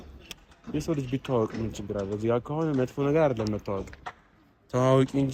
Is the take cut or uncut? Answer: uncut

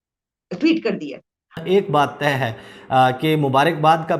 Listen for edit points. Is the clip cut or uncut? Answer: cut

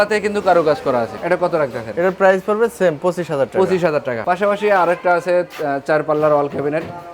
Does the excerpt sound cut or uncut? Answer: uncut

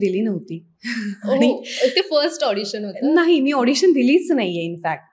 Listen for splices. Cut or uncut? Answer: uncut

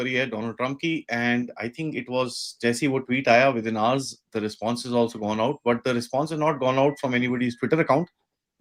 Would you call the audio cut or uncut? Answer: uncut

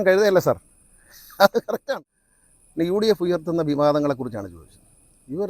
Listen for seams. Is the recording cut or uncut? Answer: cut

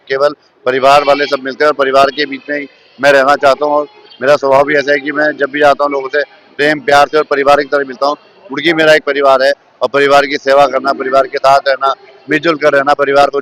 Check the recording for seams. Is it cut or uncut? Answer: uncut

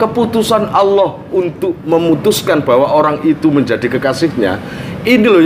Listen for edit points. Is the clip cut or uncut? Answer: uncut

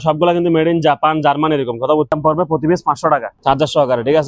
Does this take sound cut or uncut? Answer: cut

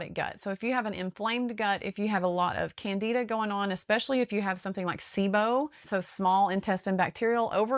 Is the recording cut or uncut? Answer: cut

